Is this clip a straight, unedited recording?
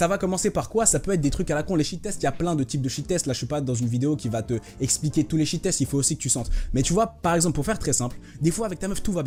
yes; 0 cuts

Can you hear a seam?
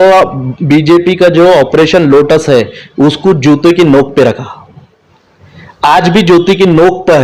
no; 0 cuts

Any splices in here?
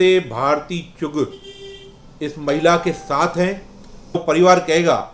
yes; 1 cut; at 4.2 s

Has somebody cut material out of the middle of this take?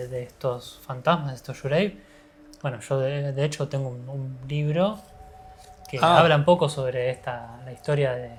no; 0 cuts

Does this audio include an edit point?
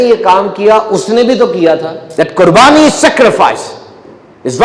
yes; 1 cut; at 2.0 s

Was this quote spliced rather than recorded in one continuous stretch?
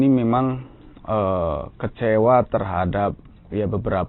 no; 0 cuts

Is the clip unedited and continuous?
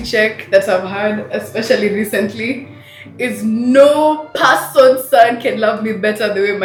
yes; 0 cuts

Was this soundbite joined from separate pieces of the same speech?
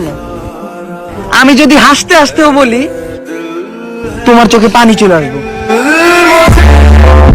no; 0 cuts

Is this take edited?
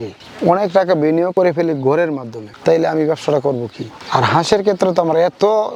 no; 0 cuts

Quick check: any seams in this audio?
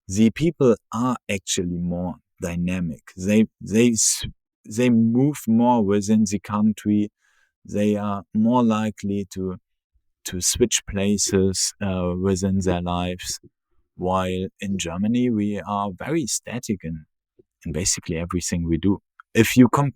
no; 0 cuts

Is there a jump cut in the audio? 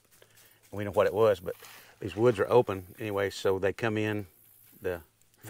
no; 0 cuts

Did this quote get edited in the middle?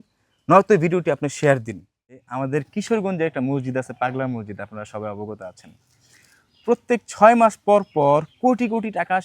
yes; 1 cut; at 2.2 s

